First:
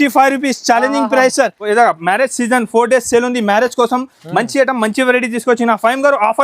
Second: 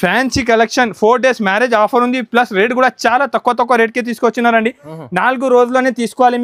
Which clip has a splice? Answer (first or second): first